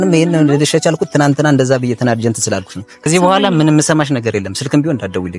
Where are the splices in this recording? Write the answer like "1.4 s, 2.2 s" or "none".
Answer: 3.1 s